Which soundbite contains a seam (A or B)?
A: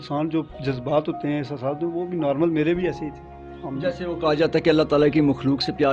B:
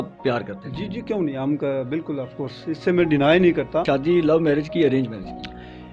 B